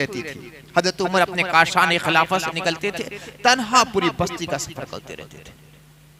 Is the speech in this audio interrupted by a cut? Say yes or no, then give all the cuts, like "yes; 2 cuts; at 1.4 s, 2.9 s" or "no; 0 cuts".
no; 0 cuts